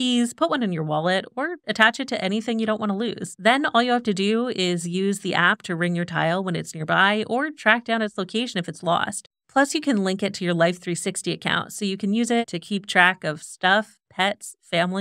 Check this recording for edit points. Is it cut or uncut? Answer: cut